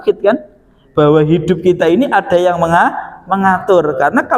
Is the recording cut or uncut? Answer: uncut